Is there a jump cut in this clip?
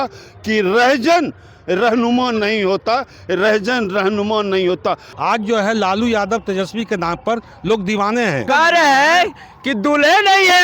yes; 2 cuts; at 5.1 s, 8.5 s

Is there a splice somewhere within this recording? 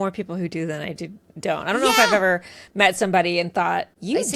no; 0 cuts

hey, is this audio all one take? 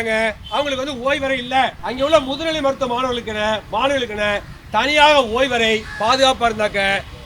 no; 1 cut; at 1.8 s

